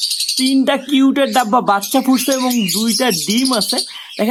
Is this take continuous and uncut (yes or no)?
yes